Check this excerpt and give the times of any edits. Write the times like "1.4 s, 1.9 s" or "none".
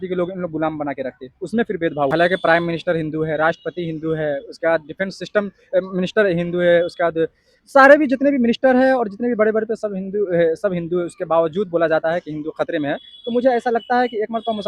2.1 s

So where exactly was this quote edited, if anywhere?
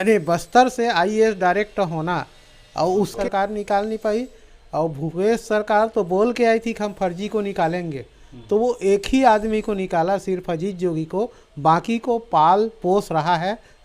3.1 s

